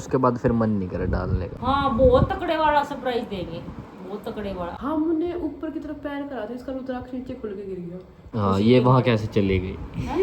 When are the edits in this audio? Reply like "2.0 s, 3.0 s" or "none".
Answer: 1.5 s, 4.7 s, 8.2 s